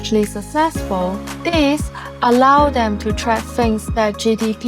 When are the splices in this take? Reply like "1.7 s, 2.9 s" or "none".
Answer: 1.3 s

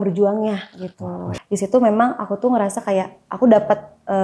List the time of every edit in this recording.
1.3 s

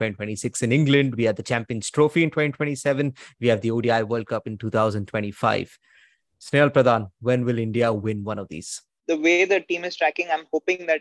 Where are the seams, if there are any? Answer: 8.9 s

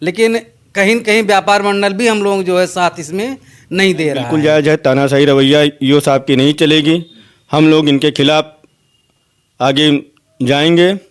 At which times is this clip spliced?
4.3 s

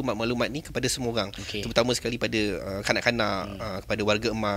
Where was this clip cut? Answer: none

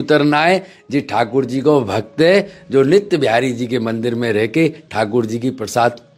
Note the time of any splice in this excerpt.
none

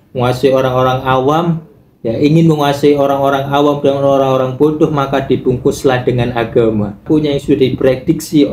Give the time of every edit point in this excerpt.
7.0 s

